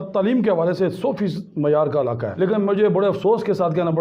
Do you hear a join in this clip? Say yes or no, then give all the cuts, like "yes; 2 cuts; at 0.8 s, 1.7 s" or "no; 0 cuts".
yes; 1 cut; at 2.2 s